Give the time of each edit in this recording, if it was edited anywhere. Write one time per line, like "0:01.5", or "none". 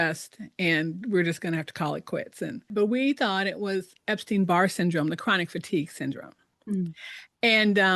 0:02.7